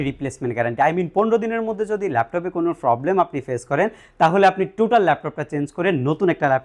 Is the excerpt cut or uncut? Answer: uncut